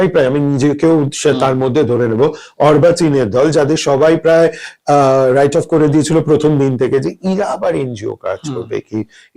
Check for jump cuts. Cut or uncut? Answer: uncut